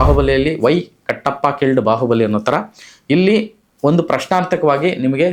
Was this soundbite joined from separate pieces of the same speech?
no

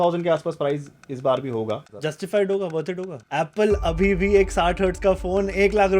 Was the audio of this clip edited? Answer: yes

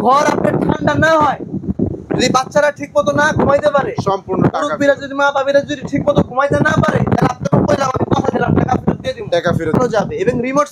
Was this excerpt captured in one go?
no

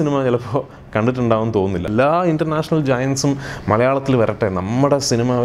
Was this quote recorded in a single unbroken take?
no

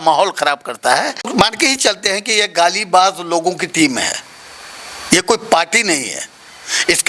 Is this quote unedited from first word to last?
no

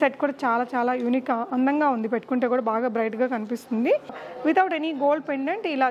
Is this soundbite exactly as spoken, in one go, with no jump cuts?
no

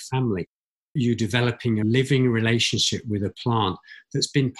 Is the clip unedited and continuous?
no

